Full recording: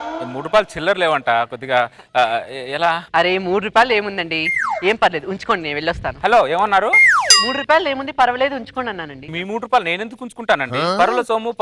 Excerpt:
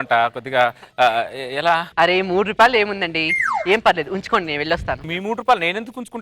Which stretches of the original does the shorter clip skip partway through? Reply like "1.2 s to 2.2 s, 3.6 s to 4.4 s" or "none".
6.1 s to 9.2 s